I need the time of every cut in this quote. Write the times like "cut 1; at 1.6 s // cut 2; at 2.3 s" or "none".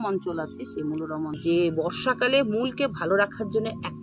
cut 1; at 1.4 s